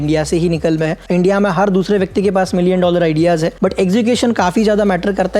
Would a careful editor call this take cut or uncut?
cut